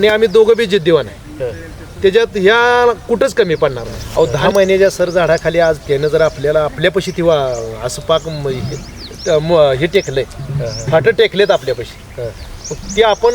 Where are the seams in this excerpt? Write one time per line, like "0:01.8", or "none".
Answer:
0:03.9